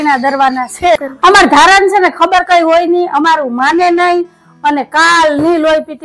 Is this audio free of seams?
no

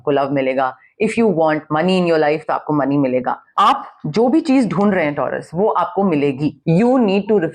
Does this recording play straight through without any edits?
no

